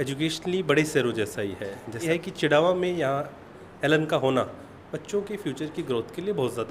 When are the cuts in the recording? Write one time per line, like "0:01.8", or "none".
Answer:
0:02.0